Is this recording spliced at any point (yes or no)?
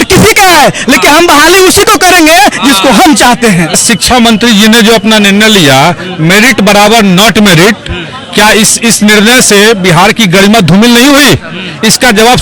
yes